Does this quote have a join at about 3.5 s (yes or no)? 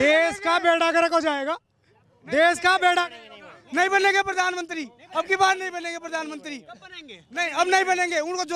no